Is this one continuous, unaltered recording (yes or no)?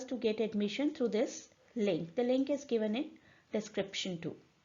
no